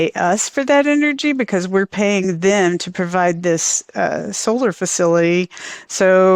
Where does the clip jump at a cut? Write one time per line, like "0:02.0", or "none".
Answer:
none